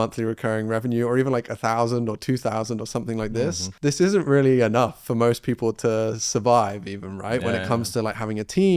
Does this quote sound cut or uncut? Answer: cut